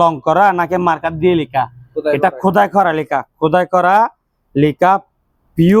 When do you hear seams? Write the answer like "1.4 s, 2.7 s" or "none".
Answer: none